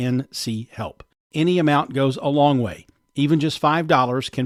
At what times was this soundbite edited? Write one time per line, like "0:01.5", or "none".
none